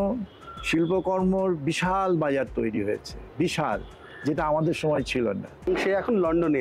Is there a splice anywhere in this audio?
yes; 1 cut; at 5.7 s

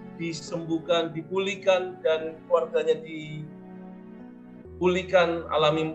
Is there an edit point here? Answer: no; 0 cuts

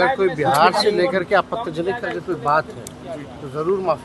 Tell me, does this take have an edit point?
no; 0 cuts

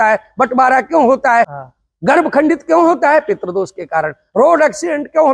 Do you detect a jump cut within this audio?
yes; 1 cut; at 1.5 s

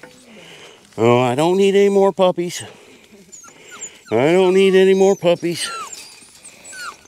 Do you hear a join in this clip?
no; 0 cuts

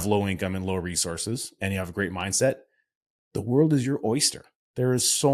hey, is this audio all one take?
yes; 0 cuts

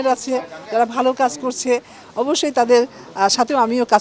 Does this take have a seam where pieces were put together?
no; 0 cuts

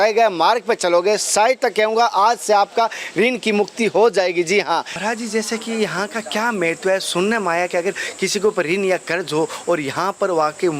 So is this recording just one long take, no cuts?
no; 1 cut; at 4.9 s

